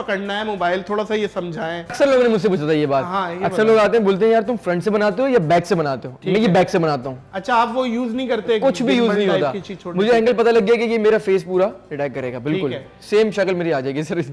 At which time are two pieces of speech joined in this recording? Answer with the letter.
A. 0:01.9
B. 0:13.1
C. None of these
A